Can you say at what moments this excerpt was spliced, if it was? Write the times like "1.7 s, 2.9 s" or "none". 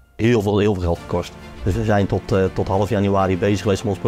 1.4 s